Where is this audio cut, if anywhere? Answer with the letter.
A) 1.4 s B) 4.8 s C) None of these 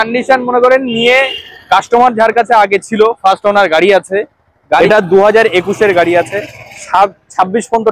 B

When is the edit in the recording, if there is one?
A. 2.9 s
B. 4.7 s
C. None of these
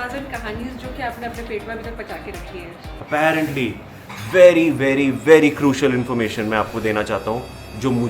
A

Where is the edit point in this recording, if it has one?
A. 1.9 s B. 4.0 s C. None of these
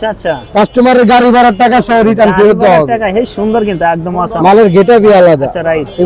C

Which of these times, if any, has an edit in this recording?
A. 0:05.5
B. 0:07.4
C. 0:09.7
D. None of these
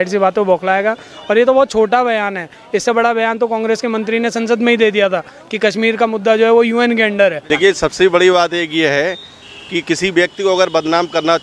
B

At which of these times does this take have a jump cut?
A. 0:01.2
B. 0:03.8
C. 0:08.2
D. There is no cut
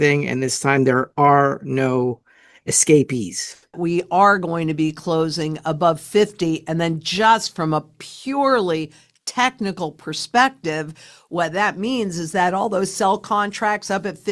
B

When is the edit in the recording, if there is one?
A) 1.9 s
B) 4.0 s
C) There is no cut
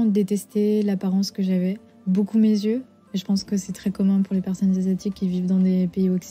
A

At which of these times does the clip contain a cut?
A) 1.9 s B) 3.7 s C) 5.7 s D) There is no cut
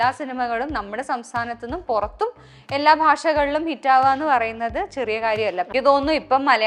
C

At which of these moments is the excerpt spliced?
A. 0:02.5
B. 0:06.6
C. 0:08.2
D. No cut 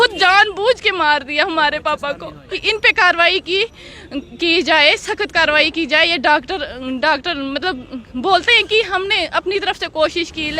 A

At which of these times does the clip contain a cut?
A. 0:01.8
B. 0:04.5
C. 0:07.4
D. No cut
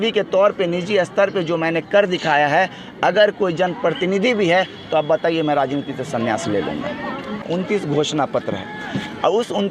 C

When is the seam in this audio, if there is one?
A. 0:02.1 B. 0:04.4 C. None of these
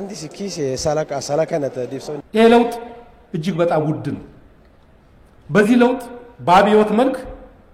A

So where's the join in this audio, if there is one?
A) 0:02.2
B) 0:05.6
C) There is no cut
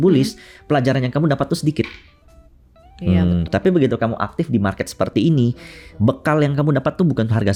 C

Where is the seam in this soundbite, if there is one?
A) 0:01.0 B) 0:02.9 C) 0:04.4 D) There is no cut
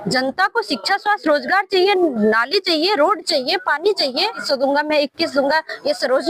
C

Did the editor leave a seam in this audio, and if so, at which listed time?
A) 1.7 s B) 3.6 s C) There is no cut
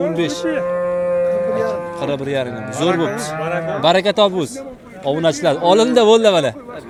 C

